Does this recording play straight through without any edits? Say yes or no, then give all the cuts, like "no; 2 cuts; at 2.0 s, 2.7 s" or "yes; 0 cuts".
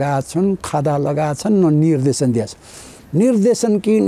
yes; 0 cuts